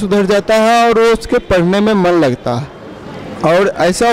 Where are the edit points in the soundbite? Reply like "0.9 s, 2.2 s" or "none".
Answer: none